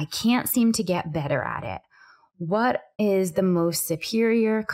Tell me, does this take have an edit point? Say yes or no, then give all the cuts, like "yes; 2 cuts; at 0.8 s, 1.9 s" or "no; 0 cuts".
yes; 1 cut; at 2.9 s